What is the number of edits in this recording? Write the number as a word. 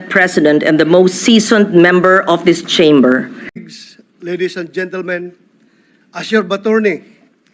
one